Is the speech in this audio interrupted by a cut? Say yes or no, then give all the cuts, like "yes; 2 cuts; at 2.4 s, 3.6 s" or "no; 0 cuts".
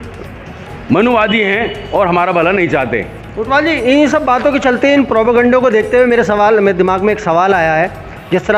no; 0 cuts